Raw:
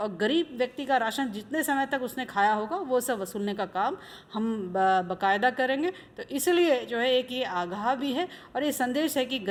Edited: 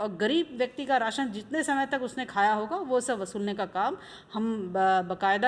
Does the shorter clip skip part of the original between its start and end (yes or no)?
no